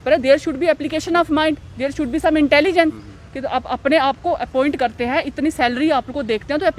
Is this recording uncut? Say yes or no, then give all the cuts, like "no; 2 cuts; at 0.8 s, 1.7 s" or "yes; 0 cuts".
yes; 0 cuts